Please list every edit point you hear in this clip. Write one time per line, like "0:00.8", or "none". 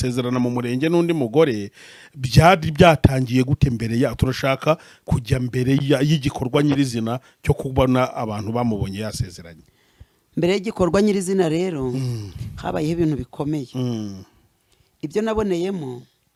none